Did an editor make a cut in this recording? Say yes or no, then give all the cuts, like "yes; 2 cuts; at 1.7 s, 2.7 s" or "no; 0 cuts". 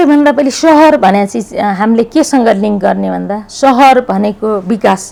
no; 0 cuts